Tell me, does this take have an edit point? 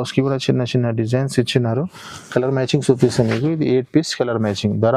no; 0 cuts

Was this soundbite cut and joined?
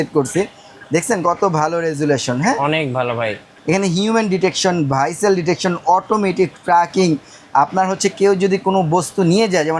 yes; 1 cut; at 3.5 s

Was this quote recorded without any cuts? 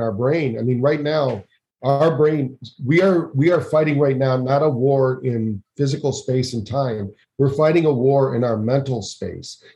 yes; 0 cuts

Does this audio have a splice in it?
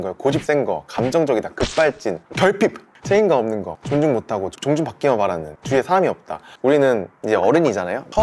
yes; 5 cuts; at 2.9 s, 3.7 s, 5.5 s, 6.4 s, 7.1 s

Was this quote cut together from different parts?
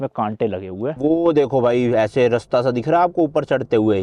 yes; 1 cut; at 0.9 s

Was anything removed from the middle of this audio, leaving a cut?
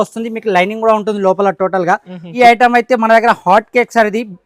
yes; 1 cut; at 2.3 s

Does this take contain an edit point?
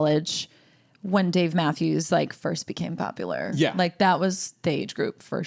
no; 0 cuts

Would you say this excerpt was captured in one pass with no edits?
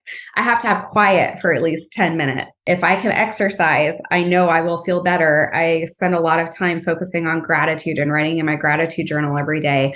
no; 2 cuts; at 2.6 s, 4.1 s

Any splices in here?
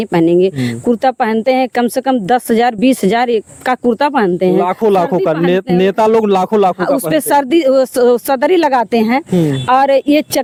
no; 0 cuts

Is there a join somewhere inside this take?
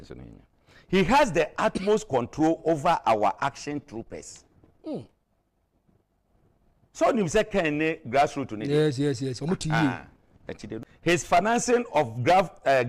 yes; 1 cut; at 10.8 s

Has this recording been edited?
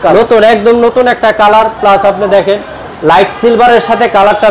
no; 0 cuts

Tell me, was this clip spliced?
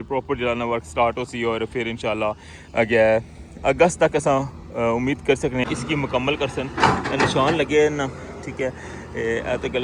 yes; 1 cut; at 5.6 s

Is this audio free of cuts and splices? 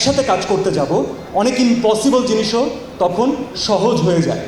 yes; 0 cuts

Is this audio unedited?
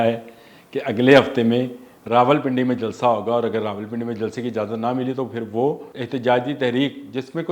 no; 1 cut; at 5.9 s

